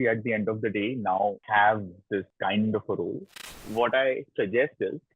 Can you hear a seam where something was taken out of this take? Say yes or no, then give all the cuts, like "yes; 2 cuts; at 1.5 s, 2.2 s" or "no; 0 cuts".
yes; 3 cuts; at 1.4 s, 2.3 s, 3.7 s